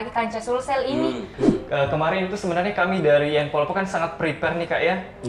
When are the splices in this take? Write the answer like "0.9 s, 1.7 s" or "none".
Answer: 1.3 s